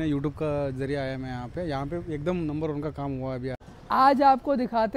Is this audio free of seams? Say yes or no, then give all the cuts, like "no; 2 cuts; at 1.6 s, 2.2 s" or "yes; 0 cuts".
no; 1 cut; at 3.9 s